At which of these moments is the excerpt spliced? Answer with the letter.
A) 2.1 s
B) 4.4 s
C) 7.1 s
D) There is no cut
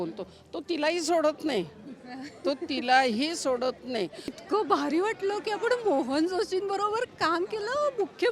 B